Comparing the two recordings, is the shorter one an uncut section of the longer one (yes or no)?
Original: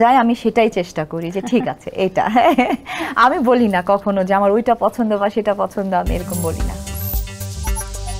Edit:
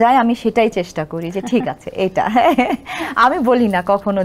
yes